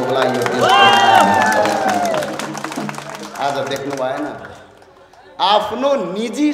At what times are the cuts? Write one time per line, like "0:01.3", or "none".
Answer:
none